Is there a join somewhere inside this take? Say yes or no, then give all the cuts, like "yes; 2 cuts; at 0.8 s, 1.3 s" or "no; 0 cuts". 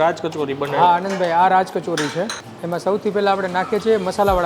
yes; 1 cut; at 2.5 s